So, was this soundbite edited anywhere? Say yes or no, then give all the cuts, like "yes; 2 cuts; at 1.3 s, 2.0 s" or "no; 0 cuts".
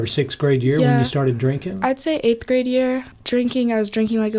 yes; 1 cut; at 3.1 s